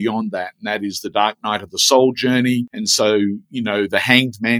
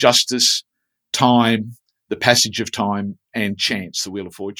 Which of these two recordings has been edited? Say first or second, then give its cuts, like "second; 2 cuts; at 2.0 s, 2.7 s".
first; 1 cut; at 2.8 s